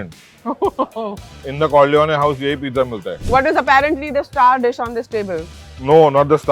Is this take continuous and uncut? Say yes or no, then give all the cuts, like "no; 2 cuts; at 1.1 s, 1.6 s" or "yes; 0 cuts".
no; 1 cut; at 3.1 s